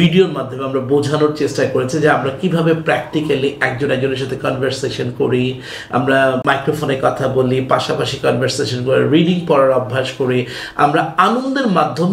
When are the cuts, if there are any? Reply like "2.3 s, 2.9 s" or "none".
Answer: 6.4 s